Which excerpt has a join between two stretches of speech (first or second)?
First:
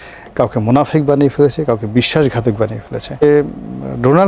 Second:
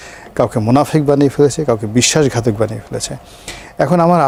first